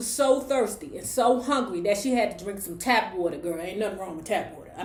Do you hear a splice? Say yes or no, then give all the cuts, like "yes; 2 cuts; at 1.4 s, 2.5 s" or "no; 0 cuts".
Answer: no; 0 cuts